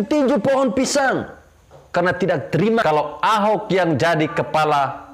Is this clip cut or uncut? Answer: cut